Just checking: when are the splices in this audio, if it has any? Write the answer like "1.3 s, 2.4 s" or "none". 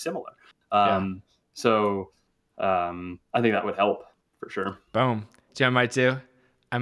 none